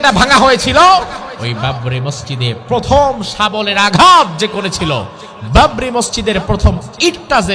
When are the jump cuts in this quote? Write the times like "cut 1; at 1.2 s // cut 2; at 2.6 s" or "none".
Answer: cut 1; at 1.3 s